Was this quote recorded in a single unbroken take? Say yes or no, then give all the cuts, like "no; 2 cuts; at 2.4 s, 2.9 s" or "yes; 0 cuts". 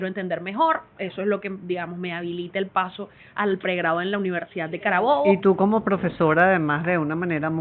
no; 1 cut; at 5.3 s